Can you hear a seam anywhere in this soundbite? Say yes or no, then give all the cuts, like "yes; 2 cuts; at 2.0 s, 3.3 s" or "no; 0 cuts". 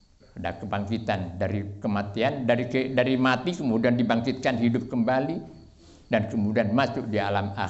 no; 0 cuts